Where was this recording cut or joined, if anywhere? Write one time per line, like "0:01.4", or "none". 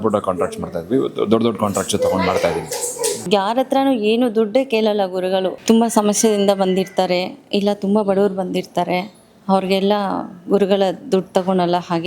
0:03.2
0:05.6